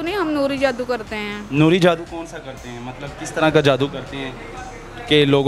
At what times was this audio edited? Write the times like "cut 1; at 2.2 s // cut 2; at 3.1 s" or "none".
none